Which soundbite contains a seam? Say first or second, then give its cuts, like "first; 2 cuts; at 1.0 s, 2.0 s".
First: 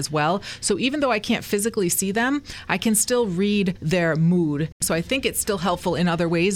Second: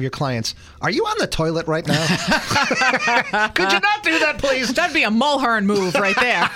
first; 2 cuts; at 3.8 s, 4.8 s